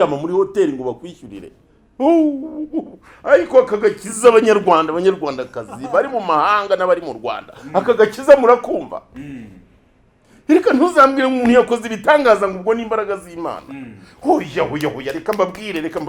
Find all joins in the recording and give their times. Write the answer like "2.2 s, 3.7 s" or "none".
none